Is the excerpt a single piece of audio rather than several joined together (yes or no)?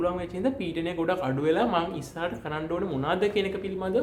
yes